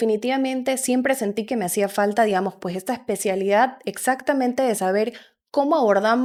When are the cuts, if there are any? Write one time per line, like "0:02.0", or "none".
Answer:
none